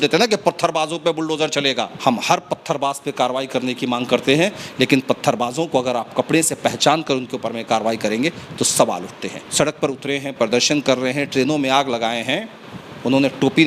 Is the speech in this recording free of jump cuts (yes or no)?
no